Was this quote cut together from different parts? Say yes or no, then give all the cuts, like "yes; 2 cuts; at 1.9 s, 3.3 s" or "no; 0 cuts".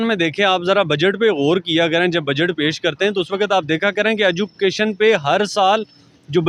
no; 0 cuts